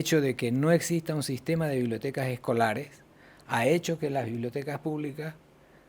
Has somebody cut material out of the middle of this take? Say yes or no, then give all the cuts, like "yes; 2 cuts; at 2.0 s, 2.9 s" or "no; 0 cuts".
no; 0 cuts